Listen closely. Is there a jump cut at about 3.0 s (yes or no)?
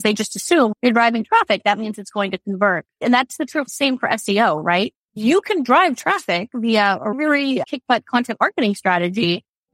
yes